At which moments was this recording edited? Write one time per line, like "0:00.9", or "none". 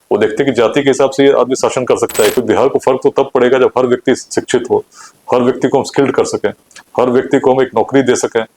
0:02.4